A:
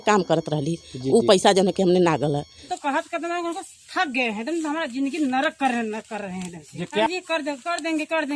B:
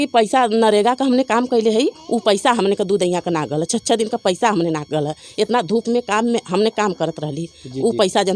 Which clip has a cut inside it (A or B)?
A